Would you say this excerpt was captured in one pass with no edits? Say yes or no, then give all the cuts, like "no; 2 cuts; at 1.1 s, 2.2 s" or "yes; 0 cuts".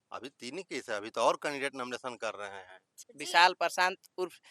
no; 1 cut; at 3.0 s